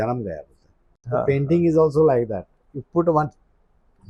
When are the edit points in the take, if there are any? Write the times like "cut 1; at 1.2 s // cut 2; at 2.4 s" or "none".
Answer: cut 1; at 1.0 s